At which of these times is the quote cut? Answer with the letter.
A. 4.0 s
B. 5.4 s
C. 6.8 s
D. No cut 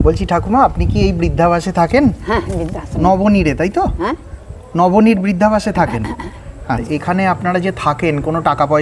C